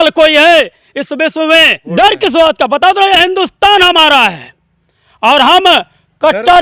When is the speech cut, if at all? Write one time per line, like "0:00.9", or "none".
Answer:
0:01.9